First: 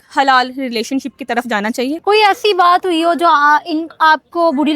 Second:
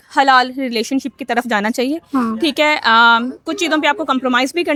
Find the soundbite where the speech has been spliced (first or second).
first